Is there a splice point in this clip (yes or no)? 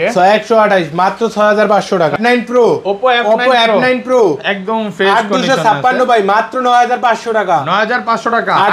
yes